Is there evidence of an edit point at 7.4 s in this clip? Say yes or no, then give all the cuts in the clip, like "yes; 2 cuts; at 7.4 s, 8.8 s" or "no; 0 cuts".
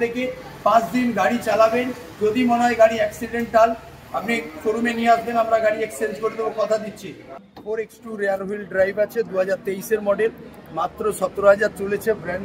yes; 1 cut; at 7.4 s